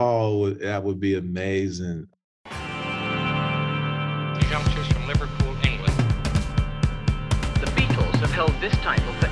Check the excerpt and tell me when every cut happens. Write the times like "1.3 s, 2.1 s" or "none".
2.1 s